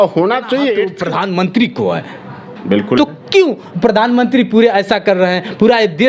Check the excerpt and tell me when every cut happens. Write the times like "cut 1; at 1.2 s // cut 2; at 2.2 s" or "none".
cut 1; at 0.9 s